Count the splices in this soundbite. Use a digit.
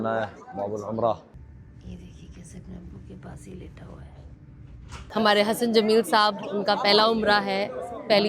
2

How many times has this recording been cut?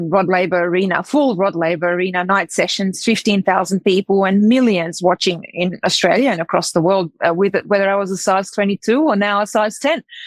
0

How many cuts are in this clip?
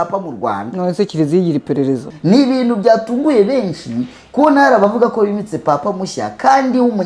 1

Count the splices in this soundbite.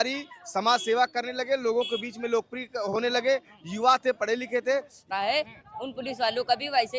1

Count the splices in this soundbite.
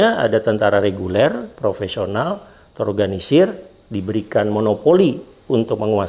0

